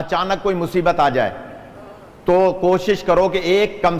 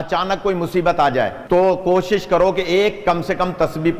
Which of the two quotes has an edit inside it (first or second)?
second